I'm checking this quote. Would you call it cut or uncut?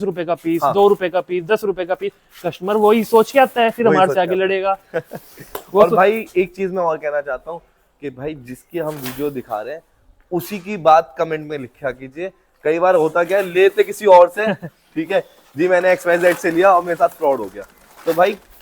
uncut